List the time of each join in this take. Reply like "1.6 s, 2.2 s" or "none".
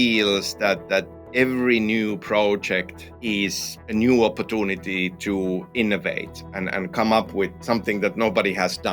7.6 s